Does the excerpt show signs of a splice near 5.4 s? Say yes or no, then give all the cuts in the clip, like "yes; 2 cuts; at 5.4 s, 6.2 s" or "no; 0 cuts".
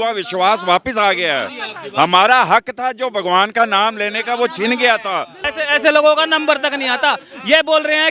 yes; 1 cut; at 5.4 s